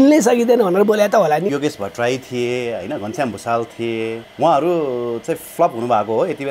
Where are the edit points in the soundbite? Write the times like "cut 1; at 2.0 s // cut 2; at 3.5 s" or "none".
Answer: cut 1; at 1.5 s // cut 2; at 4.2 s